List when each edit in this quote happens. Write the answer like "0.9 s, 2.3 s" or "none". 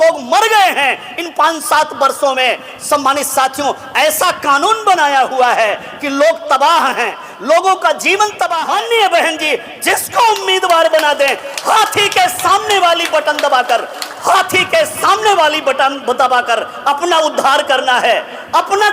8.5 s